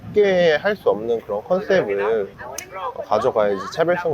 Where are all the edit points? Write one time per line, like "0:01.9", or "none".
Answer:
none